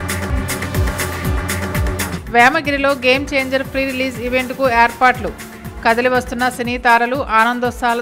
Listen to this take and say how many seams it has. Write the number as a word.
zero